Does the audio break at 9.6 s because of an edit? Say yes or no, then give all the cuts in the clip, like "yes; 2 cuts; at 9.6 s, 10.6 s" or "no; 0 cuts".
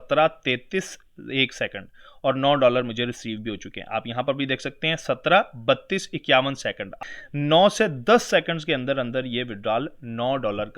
no; 1 cut; at 6.9 s